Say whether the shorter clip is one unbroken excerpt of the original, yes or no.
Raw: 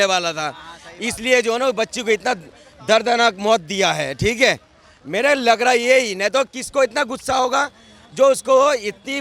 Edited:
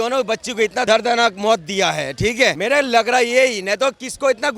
no